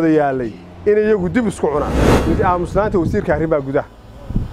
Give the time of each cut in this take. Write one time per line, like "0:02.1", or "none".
0:02.2